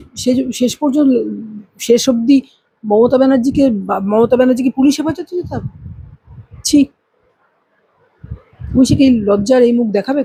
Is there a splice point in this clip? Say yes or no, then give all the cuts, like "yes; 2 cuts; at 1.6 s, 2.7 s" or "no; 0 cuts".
no; 0 cuts